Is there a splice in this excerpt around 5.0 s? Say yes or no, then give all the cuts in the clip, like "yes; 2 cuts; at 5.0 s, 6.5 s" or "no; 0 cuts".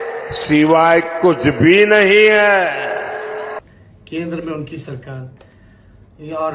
no; 1 cut; at 3.6 s